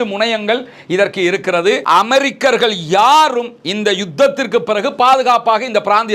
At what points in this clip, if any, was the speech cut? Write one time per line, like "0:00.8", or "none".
0:01.8